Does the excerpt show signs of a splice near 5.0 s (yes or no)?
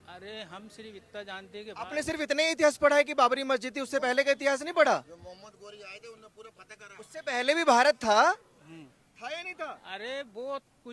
no